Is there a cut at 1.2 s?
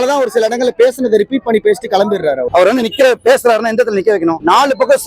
no; 1 cut; at 2.5 s

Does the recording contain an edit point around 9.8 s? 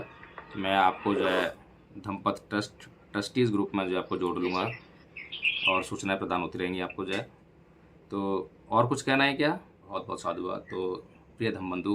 yes; 1 cut; at 9.8 s

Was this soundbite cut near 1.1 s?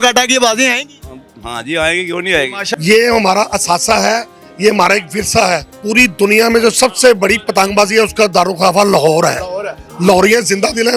no; 2 cuts; at 2.6 s, 5.7 s

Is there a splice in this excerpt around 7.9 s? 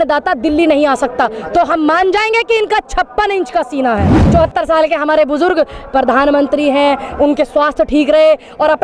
no; 1 cut; at 4.2 s

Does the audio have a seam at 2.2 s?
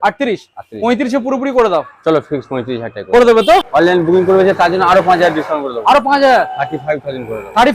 no; 1 cut; at 3.7 s

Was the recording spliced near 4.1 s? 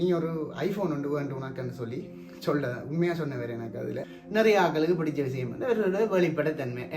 yes; 1 cut; at 4.1 s

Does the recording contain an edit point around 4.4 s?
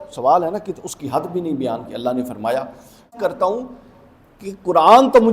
no; 1 cut; at 3.2 s

